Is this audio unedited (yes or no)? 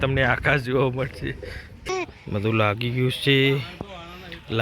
no